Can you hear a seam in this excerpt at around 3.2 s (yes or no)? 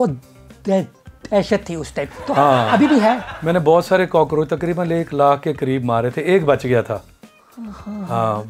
no